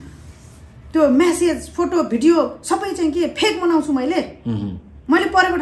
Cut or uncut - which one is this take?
uncut